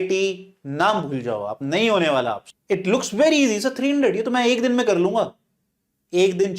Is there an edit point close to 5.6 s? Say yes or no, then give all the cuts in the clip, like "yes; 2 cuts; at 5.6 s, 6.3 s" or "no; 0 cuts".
no; 1 cut; at 2.5 s